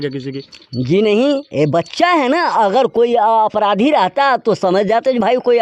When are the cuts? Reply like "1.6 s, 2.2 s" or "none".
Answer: none